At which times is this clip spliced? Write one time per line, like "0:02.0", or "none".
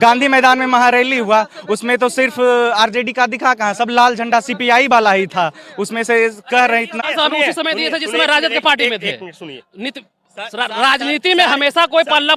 none